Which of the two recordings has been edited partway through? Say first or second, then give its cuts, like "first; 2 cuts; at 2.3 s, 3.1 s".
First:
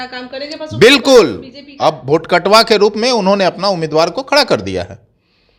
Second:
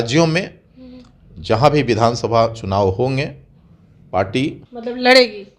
second; 1 cut; at 4.7 s